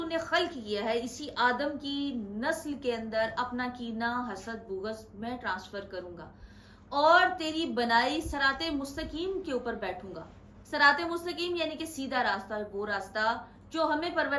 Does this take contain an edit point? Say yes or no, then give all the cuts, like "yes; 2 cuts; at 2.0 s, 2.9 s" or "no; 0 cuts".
no; 0 cuts